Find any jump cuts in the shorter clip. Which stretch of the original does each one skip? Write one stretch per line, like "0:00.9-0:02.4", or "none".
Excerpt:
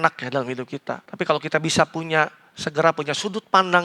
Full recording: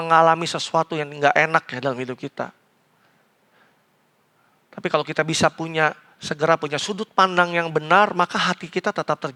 0:02.6-0:04.7